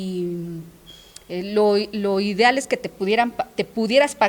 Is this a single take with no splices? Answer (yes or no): yes